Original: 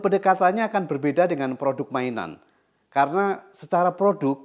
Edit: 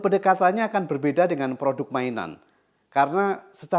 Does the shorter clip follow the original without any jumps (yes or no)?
yes